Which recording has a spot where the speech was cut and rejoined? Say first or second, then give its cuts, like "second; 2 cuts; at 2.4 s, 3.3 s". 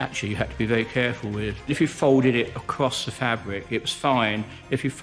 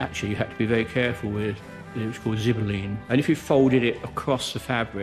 first; 1 cut; at 1.7 s